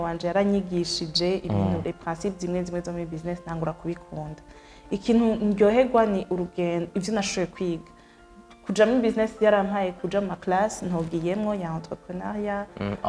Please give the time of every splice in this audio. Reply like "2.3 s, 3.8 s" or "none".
none